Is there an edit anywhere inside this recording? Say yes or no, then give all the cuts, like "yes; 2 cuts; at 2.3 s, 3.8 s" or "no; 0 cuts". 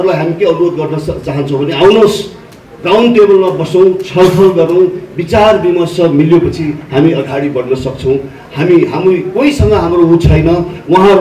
no; 0 cuts